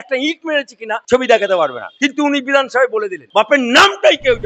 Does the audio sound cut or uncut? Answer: cut